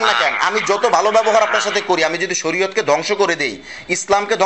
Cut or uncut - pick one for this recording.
uncut